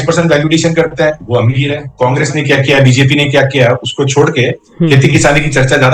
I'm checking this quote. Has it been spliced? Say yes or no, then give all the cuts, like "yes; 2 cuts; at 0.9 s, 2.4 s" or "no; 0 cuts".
yes; 1 cut; at 1.8 s